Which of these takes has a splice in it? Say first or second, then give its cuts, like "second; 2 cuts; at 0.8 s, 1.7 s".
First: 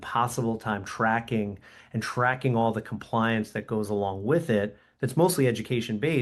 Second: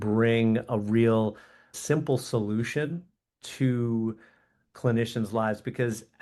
second; 1 cut; at 1.8 s